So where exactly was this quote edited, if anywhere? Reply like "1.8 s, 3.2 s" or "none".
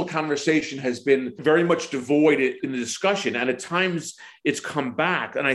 1.4 s, 2.6 s